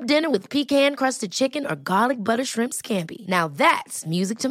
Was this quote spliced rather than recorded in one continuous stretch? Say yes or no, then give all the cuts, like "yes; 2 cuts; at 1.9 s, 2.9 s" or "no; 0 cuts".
no; 0 cuts